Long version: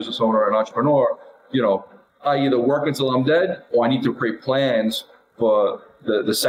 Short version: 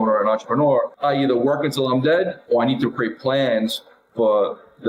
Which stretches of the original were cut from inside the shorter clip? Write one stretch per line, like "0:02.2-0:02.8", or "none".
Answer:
0:01.2-0:02.2